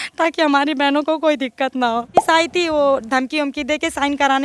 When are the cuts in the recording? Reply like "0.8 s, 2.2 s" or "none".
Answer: 2.2 s